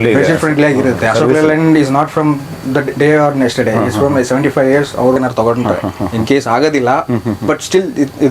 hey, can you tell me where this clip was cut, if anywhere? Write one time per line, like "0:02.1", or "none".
0:05.2